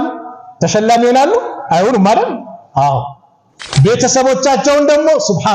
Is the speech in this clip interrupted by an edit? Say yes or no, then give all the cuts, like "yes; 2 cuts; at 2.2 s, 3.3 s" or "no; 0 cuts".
yes; 1 cut; at 3.7 s